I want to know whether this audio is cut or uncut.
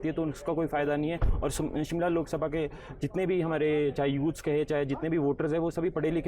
uncut